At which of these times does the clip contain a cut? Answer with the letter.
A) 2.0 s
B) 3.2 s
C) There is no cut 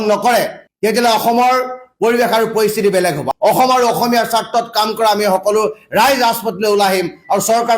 B